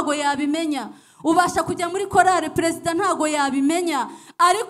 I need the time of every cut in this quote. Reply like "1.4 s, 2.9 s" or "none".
none